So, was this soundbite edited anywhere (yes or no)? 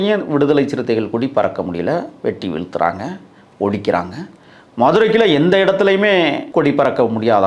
yes